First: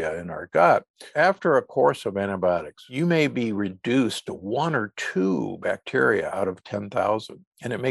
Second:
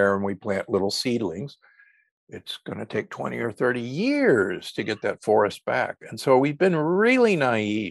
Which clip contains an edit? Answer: first; 2 cuts; at 1.1 s, 2.8 s

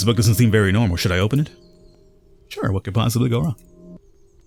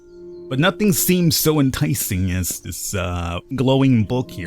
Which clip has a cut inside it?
second; 1 cut; at 3.6 s

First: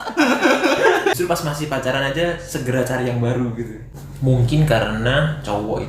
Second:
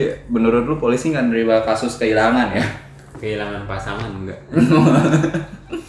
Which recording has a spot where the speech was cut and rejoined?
first; 2 cuts; at 1.1 s, 3.8 s

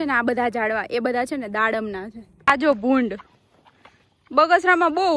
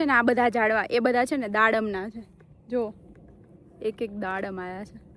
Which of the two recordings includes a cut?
first; 1 cut; at 2.5 s

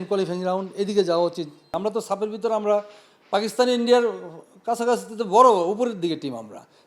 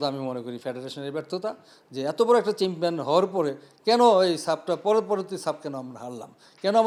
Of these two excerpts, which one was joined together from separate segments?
first; 1 cut; at 1.6 s

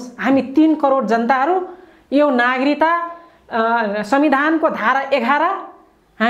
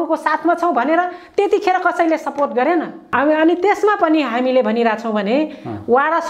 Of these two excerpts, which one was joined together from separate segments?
second; 1 cut; at 3.0 s

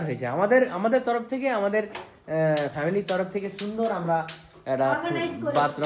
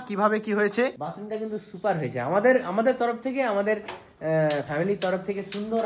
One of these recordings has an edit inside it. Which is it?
second; 1 cut; at 0.9 s

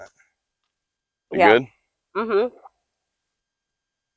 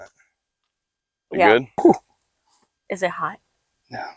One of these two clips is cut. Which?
second; 1 cut; at 1.8 s

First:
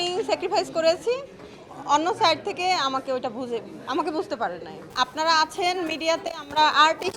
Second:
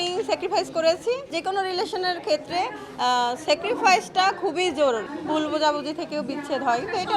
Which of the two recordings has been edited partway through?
second; 2 cuts; at 1.3 s, 5.1 s

